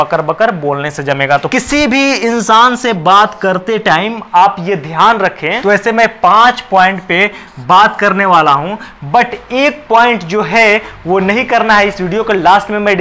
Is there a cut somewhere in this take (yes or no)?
yes